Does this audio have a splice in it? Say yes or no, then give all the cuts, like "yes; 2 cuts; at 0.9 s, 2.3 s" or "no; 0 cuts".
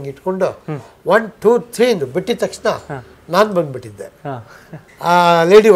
no; 0 cuts